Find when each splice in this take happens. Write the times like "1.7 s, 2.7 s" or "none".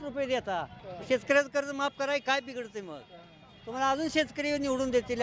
none